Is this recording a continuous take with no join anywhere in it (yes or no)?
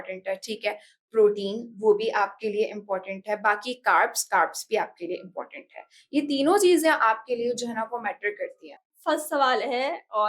no